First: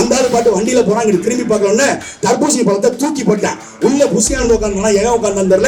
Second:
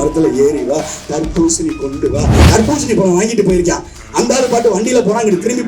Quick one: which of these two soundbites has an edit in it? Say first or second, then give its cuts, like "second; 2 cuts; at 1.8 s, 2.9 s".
second; 1 cut; at 2.3 s